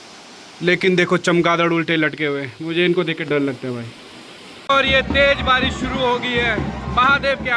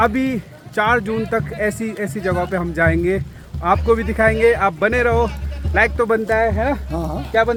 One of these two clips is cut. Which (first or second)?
first